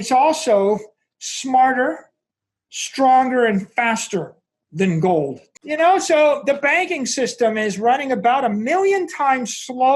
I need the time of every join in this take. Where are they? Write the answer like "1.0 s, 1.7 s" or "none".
5.5 s